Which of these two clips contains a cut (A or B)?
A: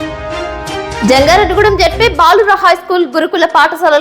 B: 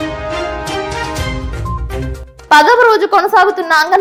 A